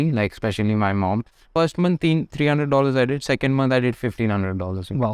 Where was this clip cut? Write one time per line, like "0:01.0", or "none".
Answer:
0:01.5